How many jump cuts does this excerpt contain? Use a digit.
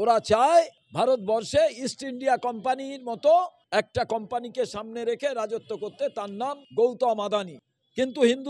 1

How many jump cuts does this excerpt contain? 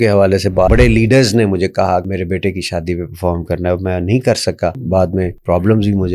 3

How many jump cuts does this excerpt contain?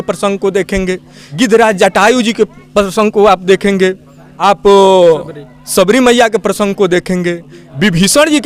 0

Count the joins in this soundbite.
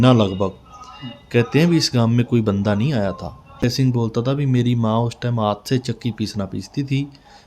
1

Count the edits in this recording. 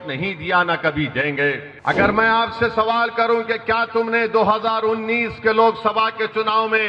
1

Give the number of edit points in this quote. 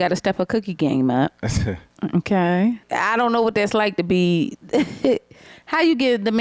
1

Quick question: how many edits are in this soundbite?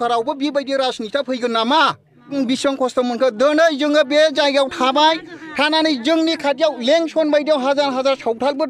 1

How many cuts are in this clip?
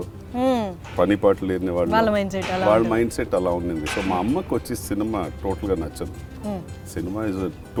0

